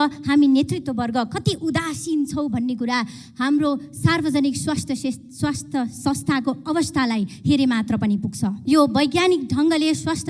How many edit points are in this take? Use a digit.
1